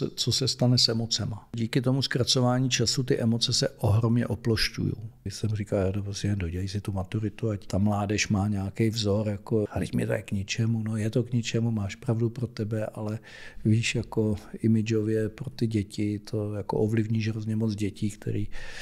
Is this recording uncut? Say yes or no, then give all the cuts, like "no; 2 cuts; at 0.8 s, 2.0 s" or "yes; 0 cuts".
no; 4 cuts; at 1.6 s, 5.3 s, 7.7 s, 9.7 s